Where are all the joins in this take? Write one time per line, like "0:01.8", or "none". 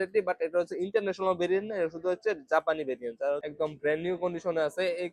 0:03.5